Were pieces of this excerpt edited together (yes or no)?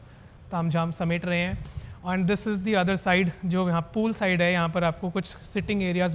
no